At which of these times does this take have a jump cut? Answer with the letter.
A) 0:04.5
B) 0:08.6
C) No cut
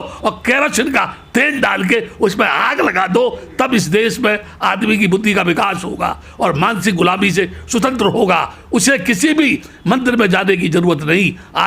C